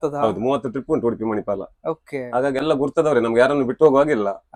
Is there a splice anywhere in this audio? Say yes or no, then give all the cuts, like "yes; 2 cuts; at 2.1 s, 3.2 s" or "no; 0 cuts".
no; 0 cuts